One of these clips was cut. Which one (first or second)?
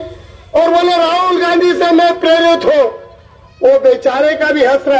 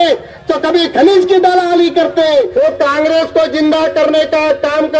second